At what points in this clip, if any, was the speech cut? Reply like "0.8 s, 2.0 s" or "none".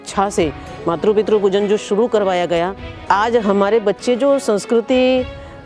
3.0 s